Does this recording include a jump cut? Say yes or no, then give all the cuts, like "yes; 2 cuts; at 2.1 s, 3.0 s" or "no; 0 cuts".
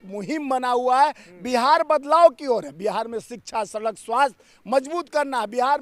no; 0 cuts